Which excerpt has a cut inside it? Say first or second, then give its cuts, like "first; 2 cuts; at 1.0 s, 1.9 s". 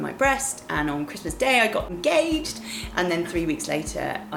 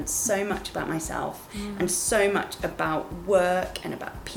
first; 1 cut; at 1.9 s